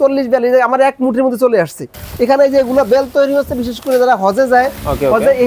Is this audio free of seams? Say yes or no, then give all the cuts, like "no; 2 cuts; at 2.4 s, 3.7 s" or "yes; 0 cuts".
no; 1 cut; at 2.0 s